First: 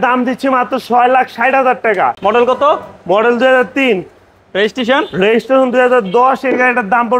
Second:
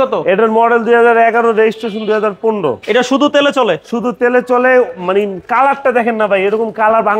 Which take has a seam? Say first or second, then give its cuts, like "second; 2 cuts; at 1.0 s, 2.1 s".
first; 1 cut; at 2.2 s